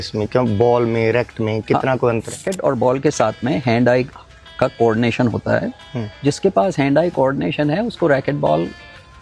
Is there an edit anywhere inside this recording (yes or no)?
yes